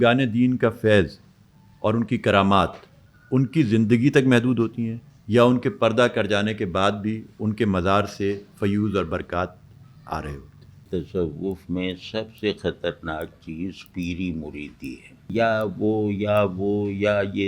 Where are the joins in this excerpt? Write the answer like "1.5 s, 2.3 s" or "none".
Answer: 10.8 s, 15.3 s